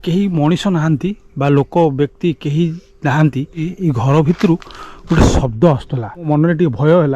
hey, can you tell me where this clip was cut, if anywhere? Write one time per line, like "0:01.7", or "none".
0:03.7
0:06.3